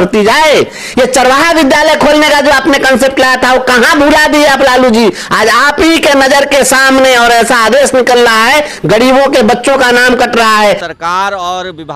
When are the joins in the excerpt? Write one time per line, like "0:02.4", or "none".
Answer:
0:10.9